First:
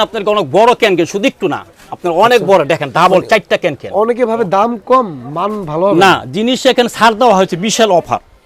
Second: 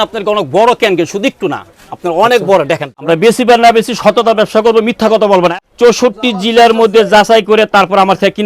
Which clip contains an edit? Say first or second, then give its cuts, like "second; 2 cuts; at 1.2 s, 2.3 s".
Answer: second; 2 cuts; at 2.9 s, 5.5 s